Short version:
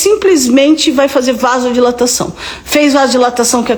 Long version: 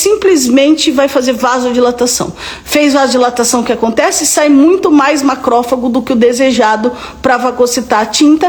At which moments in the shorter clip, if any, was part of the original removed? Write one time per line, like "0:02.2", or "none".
none